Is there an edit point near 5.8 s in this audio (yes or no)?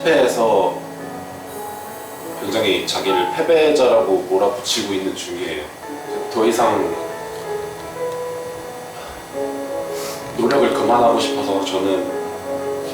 yes